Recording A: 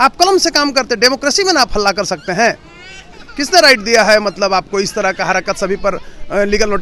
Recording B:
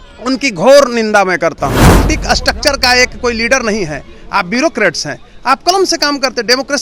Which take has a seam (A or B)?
B